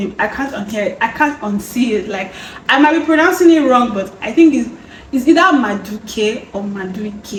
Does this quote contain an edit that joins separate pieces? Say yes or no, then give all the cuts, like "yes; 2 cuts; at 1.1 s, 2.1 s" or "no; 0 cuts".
no; 0 cuts